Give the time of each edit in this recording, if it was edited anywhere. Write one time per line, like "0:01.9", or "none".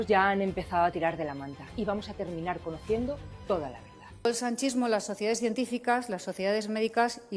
0:04.2

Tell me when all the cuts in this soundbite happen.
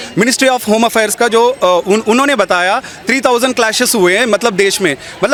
none

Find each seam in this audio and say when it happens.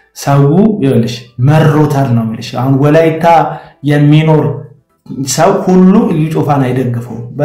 none

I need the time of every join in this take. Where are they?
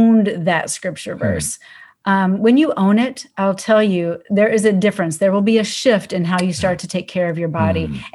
none

